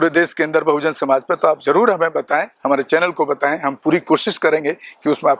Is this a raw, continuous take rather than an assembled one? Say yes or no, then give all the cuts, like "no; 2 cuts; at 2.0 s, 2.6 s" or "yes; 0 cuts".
yes; 0 cuts